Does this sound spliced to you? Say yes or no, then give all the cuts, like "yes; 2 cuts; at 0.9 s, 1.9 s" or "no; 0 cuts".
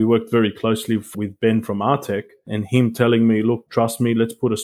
yes; 3 cuts; at 1.1 s, 2.6 s, 3.6 s